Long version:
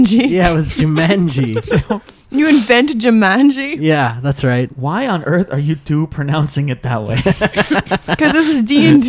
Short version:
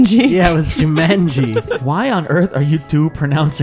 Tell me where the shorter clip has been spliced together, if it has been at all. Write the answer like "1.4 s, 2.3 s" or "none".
1.7 s